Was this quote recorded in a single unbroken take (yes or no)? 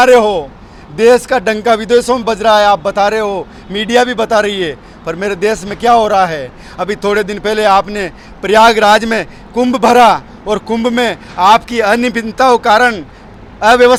yes